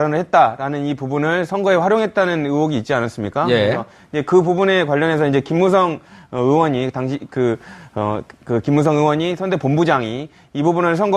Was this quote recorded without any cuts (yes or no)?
no